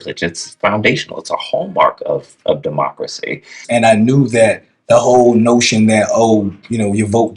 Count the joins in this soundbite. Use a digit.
1